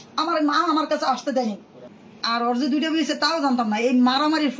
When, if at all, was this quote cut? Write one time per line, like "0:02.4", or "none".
0:01.8